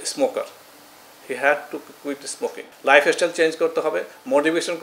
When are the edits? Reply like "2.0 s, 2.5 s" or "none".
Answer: 2.6 s